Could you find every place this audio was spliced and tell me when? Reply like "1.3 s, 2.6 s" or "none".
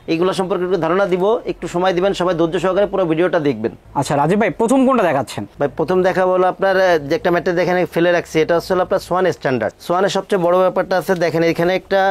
none